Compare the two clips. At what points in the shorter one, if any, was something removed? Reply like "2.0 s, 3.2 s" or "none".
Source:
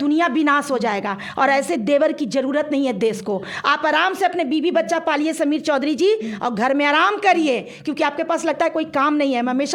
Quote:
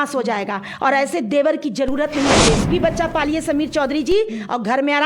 2.7 s